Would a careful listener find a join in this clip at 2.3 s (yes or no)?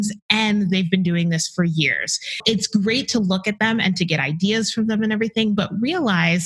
yes